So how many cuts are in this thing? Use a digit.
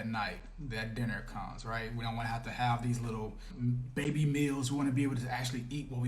1